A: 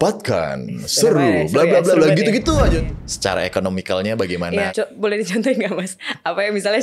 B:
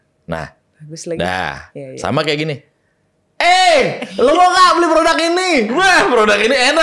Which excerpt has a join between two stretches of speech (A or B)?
A